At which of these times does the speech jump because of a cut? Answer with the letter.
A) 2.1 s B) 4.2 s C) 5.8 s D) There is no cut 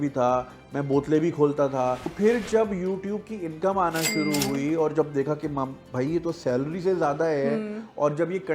A